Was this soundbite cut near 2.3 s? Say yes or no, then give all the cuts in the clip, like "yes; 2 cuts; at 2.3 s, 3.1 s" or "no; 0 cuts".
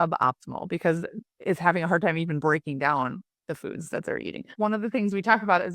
no; 1 cut; at 4.5 s